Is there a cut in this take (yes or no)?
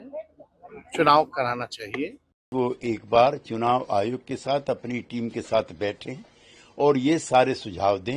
yes